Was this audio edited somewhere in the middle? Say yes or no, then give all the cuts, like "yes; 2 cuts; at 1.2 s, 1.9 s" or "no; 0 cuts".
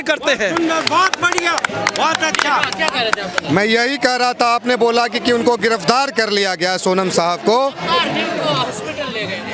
no; 0 cuts